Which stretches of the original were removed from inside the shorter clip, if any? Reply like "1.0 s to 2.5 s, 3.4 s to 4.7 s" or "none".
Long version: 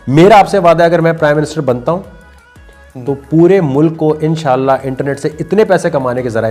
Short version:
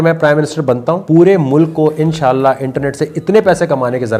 2.0 s to 3.3 s